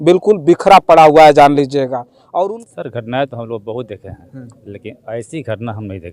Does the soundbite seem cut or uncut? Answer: cut